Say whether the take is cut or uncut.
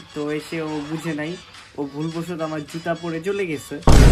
uncut